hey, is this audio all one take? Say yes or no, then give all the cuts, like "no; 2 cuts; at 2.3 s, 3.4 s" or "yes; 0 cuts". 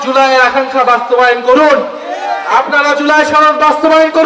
yes; 0 cuts